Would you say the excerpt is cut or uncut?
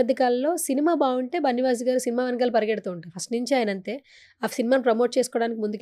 uncut